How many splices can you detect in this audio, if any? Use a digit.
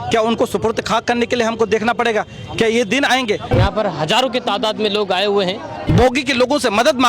2